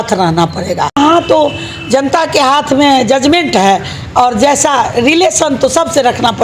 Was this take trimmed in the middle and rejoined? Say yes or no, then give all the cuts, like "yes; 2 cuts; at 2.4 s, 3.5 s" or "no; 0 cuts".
yes; 1 cut; at 1.0 s